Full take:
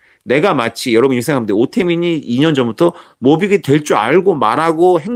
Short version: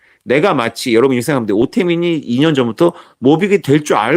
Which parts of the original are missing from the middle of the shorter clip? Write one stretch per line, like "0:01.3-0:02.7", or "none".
none